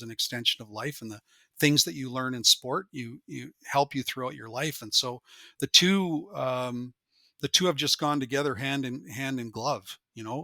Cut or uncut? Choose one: uncut